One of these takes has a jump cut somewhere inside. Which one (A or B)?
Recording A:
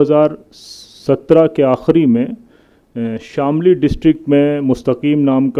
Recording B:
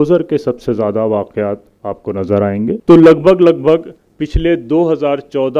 B